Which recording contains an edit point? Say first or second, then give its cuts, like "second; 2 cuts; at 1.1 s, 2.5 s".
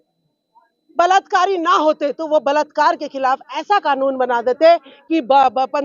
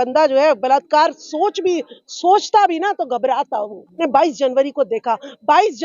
second; 1 cut; at 4.0 s